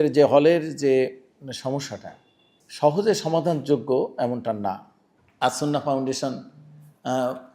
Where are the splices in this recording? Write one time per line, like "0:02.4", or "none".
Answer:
none

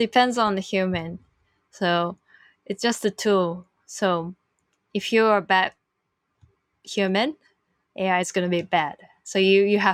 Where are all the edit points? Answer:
none

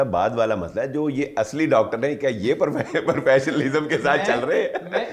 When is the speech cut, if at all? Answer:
none

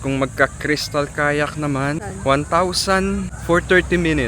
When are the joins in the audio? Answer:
0:02.0
0:03.3

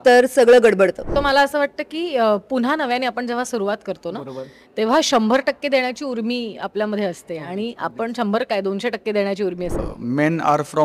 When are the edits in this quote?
0:01.1
0:09.8

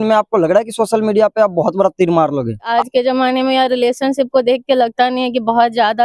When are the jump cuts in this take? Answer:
0:02.7

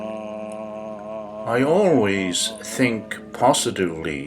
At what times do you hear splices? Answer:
0:01.5

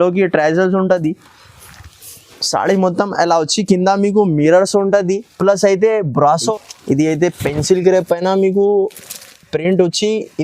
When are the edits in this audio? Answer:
0:06.5

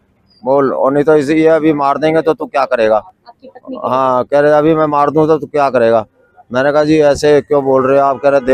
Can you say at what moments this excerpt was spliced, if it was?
none

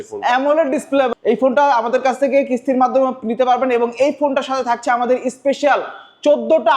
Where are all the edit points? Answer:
0:01.1

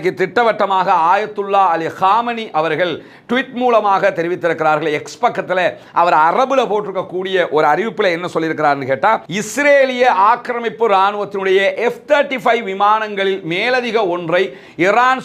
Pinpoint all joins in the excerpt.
0:09.4

